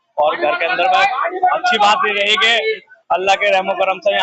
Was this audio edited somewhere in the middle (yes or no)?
no